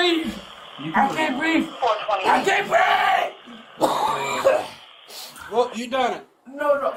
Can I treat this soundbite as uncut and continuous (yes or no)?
yes